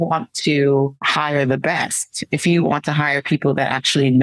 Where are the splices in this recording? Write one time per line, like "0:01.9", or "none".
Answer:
0:01.0